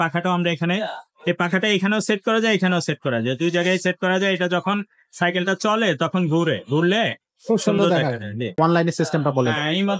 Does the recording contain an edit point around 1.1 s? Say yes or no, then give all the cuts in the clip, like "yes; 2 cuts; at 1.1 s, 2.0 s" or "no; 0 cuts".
no; 1 cut; at 8.5 s